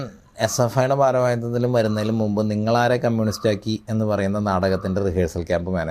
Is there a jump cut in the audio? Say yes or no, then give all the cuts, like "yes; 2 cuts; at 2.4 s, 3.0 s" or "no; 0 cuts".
no; 0 cuts